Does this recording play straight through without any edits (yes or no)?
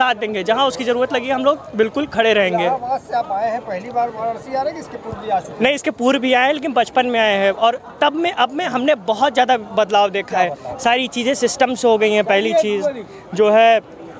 yes